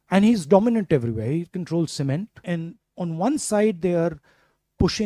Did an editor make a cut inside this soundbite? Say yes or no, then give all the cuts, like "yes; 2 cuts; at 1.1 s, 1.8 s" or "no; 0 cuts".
yes; 1 cut; at 2.4 s